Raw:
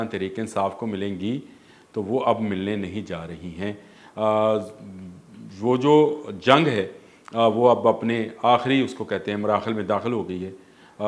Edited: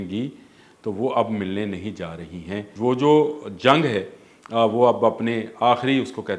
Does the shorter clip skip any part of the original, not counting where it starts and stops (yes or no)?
yes